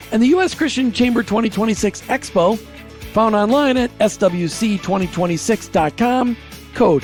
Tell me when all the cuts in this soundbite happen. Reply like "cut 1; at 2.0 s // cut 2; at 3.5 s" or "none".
none